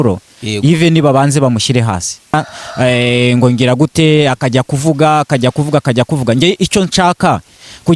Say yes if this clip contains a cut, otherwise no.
yes